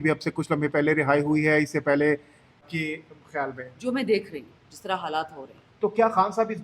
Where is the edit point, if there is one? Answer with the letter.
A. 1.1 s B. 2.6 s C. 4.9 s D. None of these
B